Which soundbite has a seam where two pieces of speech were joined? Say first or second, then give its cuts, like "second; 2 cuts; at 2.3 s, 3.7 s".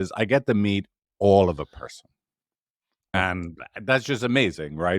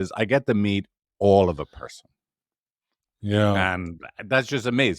first; 1 cut; at 3.1 s